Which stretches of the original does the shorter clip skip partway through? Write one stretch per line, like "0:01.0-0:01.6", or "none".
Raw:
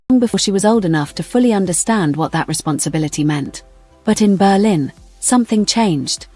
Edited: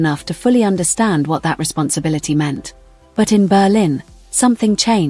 none